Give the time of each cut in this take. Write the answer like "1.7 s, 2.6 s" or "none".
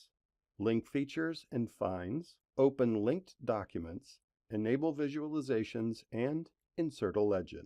6.6 s